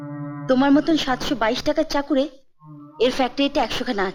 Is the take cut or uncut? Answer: uncut